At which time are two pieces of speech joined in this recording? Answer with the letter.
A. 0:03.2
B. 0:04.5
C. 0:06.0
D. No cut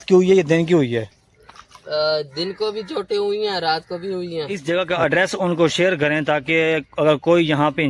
B